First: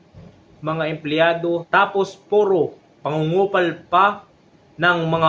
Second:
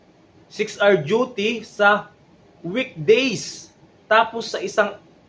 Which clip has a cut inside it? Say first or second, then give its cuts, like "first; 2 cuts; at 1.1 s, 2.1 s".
first; 1 cut; at 1.7 s